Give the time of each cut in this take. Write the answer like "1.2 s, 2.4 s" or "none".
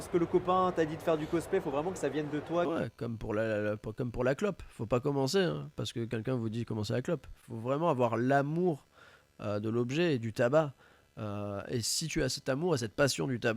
2.7 s

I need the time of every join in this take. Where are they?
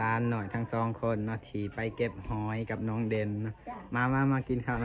none

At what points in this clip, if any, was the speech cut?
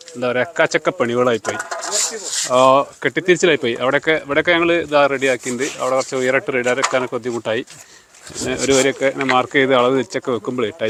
none

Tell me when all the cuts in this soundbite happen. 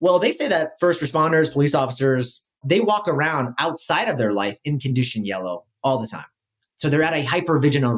2.6 s

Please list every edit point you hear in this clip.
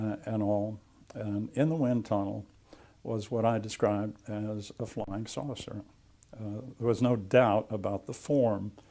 4.4 s

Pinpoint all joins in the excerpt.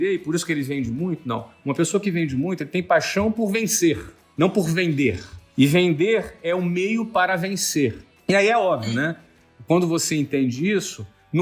none

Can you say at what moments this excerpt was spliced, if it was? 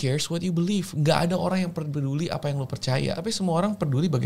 3.2 s

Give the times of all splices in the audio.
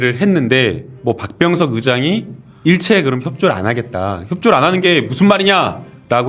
none

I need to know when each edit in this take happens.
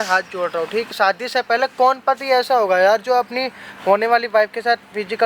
0.9 s

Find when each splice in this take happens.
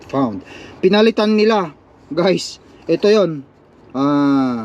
none

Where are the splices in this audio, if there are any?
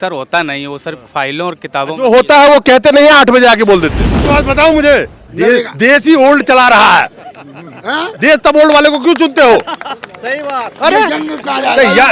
4.2 s

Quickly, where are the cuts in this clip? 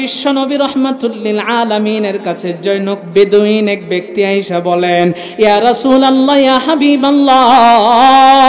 none

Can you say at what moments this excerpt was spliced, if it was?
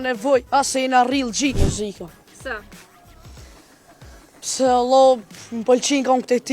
1.6 s

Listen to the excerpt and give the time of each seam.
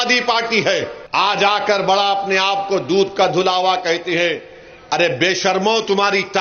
1.0 s

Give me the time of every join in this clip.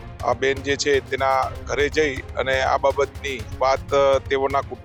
none

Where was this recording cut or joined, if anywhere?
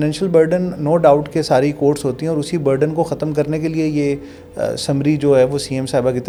none

